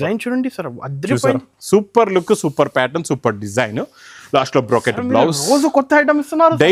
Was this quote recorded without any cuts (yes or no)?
yes